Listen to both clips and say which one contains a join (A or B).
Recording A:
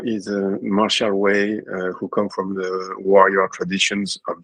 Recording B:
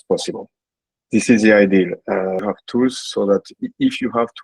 B